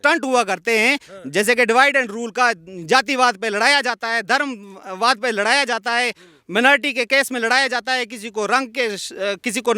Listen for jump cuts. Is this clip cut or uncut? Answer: uncut